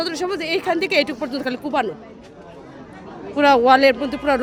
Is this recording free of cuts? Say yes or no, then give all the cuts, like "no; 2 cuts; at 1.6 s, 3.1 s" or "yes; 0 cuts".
yes; 0 cuts